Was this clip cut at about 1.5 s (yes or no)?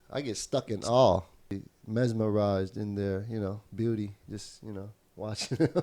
yes